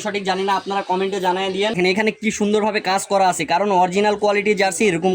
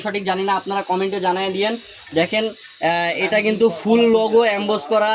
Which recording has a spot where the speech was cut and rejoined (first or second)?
first